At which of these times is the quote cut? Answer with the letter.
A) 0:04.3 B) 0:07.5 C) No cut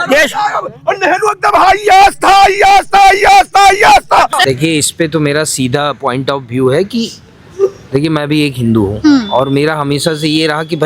A